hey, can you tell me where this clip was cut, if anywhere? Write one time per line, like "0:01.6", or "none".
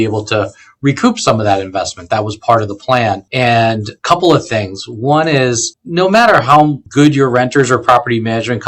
0:03.8
0:05.7
0:06.8